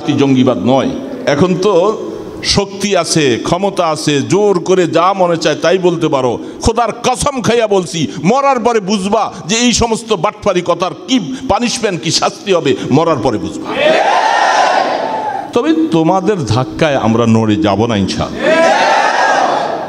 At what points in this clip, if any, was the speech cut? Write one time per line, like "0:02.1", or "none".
0:01.2
0:15.4